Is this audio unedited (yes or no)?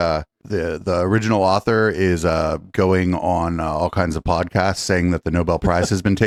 yes